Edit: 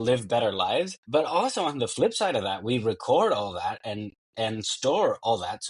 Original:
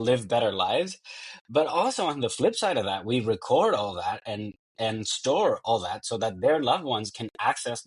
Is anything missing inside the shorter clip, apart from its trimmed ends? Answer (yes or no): yes